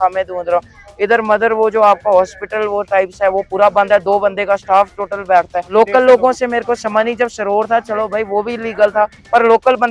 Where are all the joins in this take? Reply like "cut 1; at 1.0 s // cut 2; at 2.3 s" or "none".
cut 1; at 5.7 s

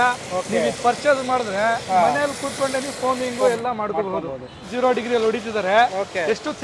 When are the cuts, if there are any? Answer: cut 1; at 4.6 s

